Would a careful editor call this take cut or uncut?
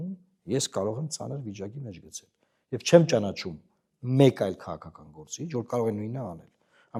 uncut